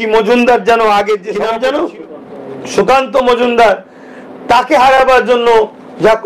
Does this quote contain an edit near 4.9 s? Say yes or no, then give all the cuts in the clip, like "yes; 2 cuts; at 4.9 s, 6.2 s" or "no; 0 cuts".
no; 1 cut; at 1.3 s